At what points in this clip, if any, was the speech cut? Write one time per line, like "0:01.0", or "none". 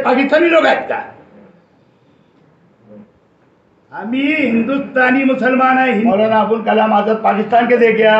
0:06.1